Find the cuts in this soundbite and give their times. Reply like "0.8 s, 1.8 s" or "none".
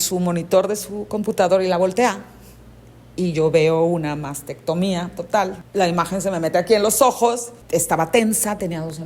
5.6 s, 7.5 s